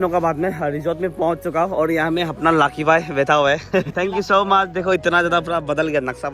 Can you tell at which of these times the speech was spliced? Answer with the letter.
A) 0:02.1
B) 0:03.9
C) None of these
B